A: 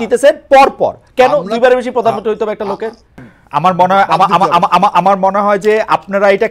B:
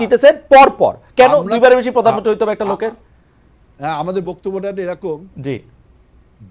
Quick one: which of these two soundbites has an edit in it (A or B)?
A